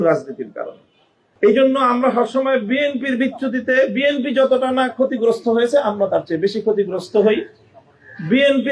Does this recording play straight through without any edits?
no; 1 cut; at 1.2 s

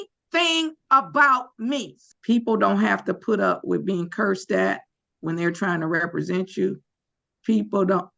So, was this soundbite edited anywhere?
yes; 1 cut; at 2.0 s

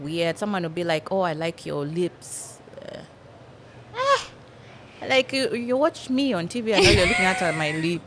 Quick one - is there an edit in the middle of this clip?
no; 0 cuts

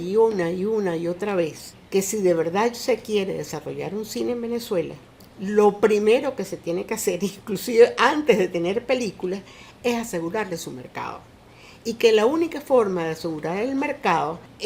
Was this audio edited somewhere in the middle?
no; 0 cuts

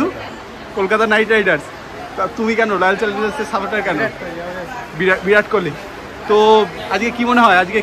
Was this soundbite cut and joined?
no; 0 cuts

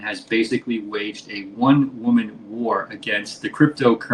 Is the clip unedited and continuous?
yes; 0 cuts

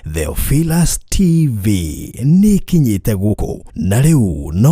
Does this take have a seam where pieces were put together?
yes; 1 cut; at 3.5 s

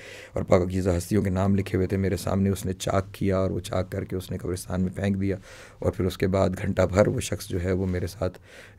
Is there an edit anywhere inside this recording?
no; 0 cuts

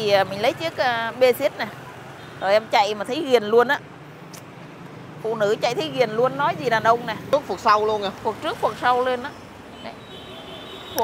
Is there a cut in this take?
yes; 1 cut; at 7.3 s

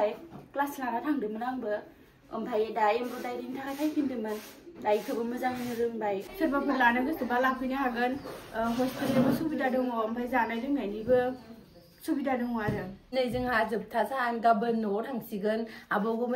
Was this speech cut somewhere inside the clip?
yes; 2 cuts; at 6.2 s, 13.1 s

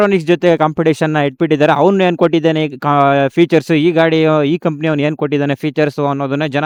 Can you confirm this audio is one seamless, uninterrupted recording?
yes; 0 cuts

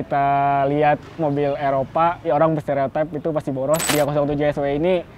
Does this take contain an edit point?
yes; 1 cut; at 3.9 s

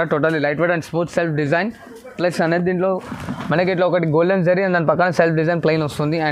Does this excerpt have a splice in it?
no; 0 cuts

